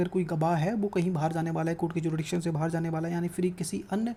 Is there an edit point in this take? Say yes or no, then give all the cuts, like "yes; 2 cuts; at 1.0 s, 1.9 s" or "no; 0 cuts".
no; 0 cuts